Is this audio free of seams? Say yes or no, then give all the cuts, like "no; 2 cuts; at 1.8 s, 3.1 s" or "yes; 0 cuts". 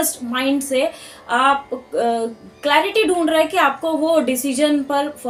yes; 0 cuts